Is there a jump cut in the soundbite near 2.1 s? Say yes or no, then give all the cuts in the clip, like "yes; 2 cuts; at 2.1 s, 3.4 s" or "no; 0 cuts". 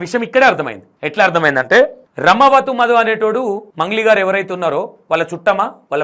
no; 0 cuts